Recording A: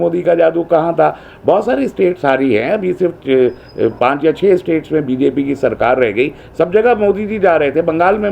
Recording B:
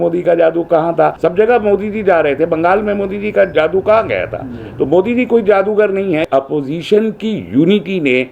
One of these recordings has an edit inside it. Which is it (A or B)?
B